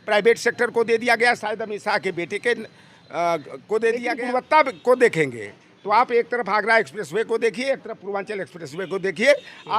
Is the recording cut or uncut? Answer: cut